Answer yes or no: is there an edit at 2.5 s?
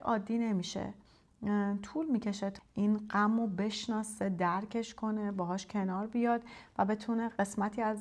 yes